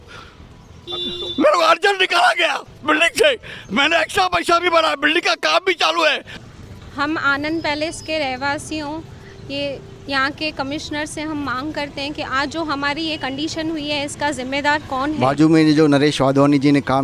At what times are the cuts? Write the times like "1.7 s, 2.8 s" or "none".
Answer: 6.4 s, 15.2 s